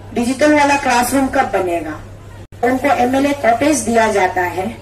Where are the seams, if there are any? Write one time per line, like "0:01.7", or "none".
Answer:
0:02.6